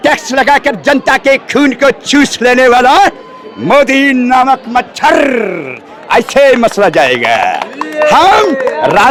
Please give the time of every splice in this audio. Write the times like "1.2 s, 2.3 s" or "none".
none